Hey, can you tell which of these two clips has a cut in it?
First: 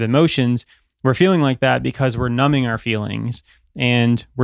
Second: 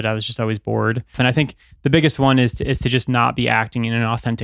second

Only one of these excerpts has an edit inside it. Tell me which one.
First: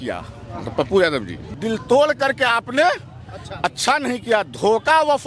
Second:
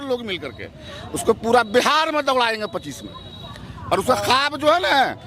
first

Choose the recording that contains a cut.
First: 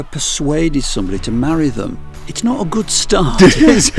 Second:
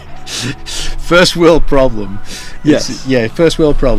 first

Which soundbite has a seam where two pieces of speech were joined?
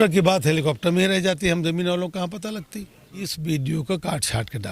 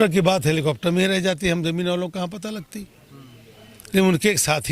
first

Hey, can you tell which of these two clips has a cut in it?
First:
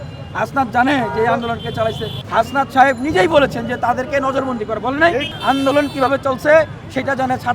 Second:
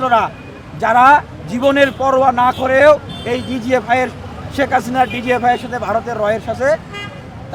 first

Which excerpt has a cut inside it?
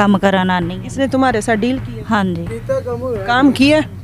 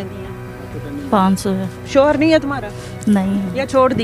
second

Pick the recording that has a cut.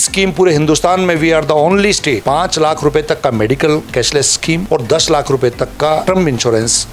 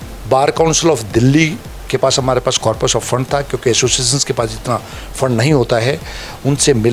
first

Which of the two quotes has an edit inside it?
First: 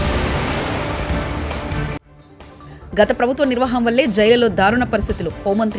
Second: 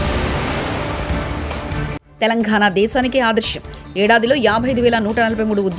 second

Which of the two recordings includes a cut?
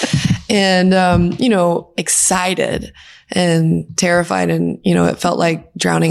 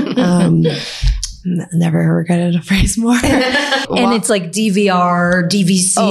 second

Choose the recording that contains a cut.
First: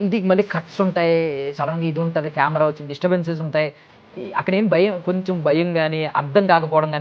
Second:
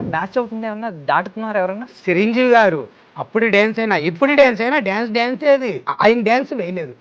second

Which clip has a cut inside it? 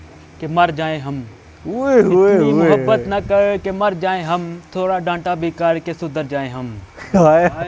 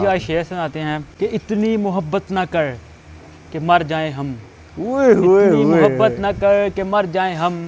second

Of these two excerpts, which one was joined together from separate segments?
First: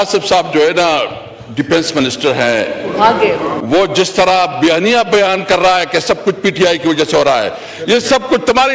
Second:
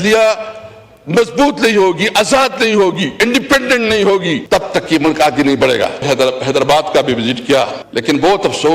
second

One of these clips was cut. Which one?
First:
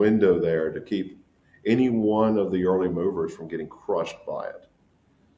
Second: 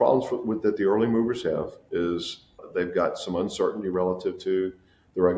second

